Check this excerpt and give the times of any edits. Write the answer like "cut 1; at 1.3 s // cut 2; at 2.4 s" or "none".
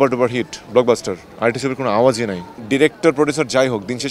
cut 1; at 2.6 s